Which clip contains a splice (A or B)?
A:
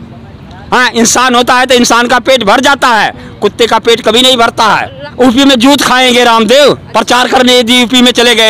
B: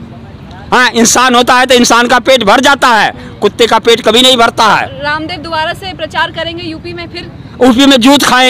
A